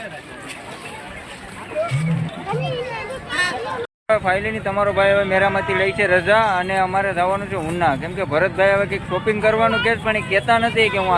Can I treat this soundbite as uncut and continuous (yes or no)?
no